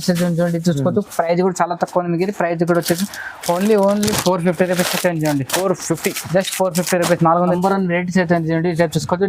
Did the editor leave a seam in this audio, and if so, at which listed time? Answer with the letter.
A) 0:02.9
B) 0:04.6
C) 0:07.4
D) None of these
C